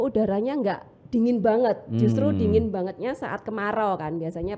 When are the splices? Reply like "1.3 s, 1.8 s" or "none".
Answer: none